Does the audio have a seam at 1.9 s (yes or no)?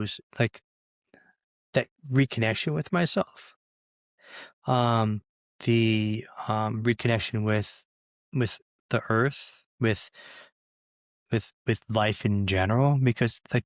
no